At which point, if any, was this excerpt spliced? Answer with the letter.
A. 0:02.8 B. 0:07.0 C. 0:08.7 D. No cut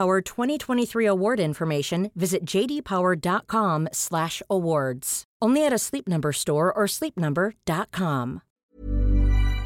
C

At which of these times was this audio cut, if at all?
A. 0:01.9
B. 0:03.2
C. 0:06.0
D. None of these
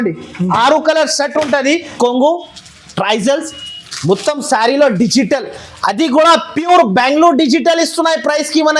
A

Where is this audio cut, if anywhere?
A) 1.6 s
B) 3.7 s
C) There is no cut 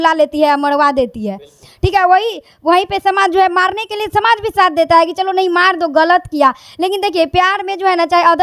C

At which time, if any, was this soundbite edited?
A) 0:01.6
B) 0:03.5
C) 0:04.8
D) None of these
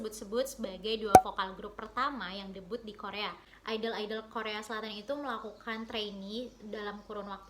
B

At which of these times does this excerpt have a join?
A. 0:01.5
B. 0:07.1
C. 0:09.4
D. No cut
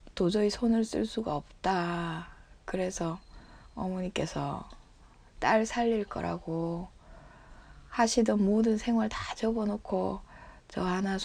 D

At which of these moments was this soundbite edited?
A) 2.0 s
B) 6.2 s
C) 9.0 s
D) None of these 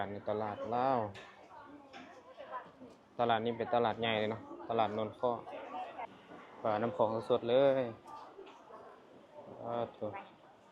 B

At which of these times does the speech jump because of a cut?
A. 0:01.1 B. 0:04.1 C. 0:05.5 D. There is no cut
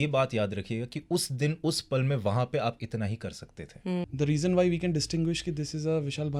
B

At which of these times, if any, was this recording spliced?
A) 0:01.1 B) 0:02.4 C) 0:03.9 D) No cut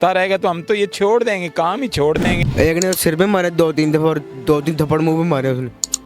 B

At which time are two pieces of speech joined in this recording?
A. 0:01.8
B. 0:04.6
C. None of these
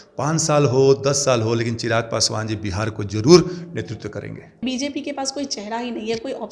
B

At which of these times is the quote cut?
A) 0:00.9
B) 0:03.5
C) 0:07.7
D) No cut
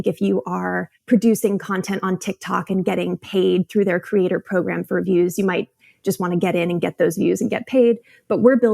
A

